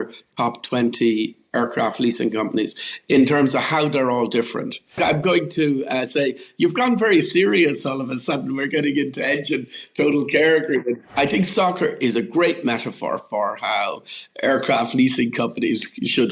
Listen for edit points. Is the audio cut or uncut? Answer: cut